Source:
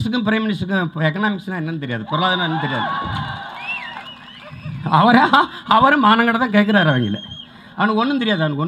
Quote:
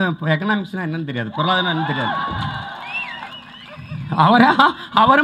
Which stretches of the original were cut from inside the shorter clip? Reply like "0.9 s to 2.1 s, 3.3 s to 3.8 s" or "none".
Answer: none